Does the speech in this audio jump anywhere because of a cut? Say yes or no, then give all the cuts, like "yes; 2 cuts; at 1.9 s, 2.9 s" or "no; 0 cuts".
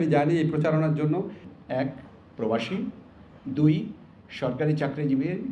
yes; 1 cut; at 1.5 s